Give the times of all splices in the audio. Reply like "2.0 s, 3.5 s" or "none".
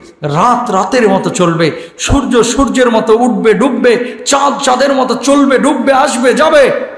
none